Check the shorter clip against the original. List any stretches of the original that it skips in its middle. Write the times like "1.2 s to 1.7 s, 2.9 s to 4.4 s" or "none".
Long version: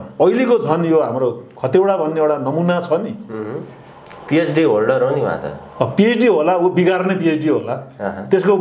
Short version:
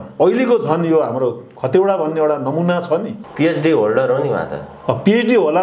3.2 s to 4.1 s